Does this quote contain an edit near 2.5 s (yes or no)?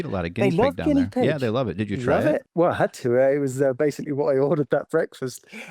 yes